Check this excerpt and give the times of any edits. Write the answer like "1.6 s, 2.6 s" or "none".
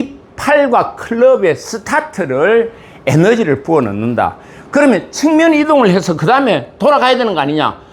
none

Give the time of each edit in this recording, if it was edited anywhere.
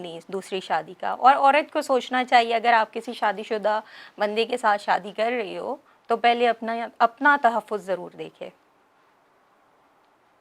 none

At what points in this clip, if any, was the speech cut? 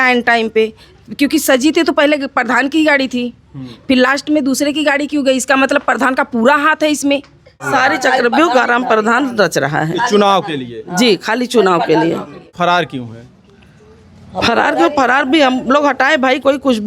7.7 s, 12.5 s

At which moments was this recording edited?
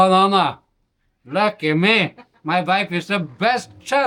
none

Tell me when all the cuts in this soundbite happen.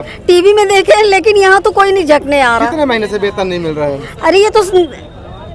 none

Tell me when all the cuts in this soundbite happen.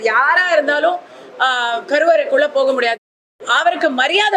2.9 s

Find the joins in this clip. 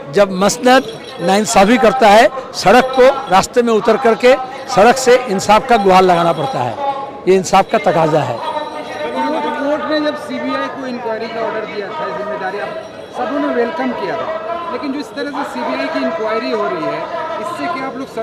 none

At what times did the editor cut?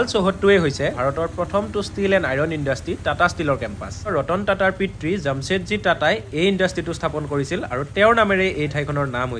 1.0 s, 4.1 s

